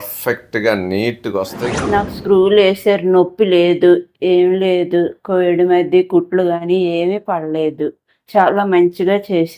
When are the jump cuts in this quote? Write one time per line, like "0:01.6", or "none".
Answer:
0:01.6